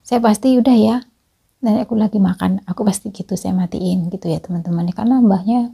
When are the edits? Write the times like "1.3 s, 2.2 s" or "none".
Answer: none